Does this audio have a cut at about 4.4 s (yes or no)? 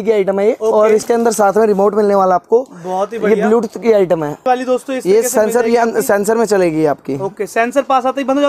yes